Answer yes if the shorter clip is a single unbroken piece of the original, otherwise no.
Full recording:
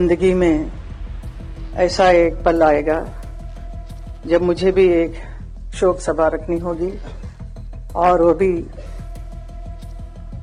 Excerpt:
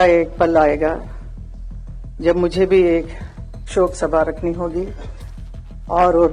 yes